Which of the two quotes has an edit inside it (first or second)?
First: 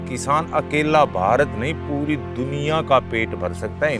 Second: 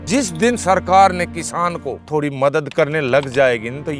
second